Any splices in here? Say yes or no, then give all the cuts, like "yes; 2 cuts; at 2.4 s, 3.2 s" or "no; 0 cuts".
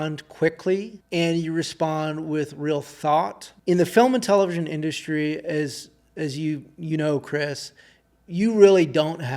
yes; 2 cuts; at 1.0 s, 3.5 s